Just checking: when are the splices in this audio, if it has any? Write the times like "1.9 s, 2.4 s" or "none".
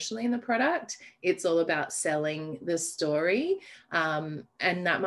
none